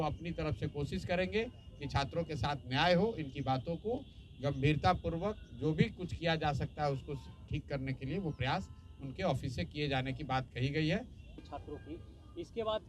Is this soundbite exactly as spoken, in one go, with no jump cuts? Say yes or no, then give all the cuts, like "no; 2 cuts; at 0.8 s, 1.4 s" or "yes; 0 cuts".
no; 1 cut; at 11.3 s